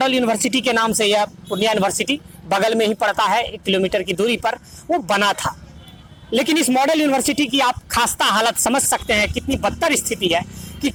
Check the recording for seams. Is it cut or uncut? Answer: uncut